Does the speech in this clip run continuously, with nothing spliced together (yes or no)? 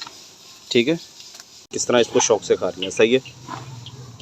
no